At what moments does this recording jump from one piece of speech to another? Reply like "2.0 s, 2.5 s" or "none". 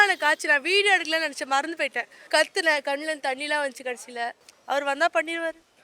2.1 s, 4.5 s